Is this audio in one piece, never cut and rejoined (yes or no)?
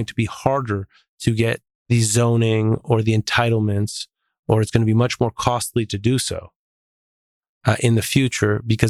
no